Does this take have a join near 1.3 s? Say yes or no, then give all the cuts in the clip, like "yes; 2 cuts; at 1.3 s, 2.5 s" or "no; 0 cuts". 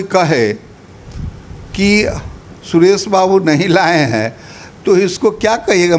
no; 0 cuts